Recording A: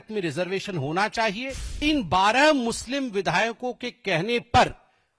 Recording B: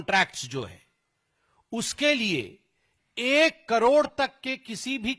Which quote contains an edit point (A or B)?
A